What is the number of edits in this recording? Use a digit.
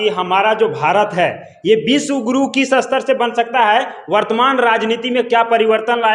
0